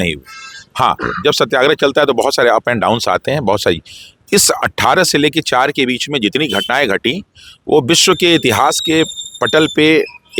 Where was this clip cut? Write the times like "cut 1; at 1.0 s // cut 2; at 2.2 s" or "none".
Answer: none